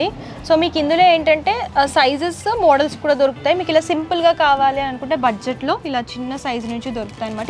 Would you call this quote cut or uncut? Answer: uncut